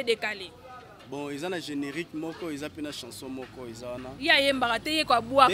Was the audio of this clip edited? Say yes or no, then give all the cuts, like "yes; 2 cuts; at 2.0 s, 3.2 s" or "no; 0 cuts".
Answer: no; 0 cuts